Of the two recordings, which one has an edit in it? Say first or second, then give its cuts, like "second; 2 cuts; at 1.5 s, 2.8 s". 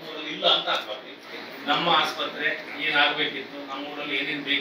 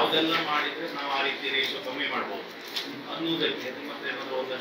first; 1 cut; at 1.1 s